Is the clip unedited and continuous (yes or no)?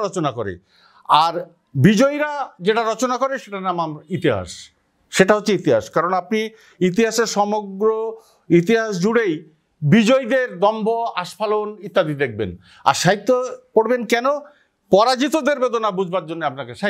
yes